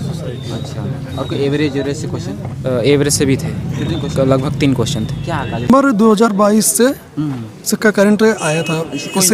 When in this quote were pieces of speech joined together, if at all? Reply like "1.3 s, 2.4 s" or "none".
5.7 s